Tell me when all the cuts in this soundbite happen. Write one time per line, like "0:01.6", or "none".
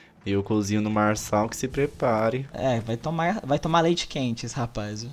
0:02.5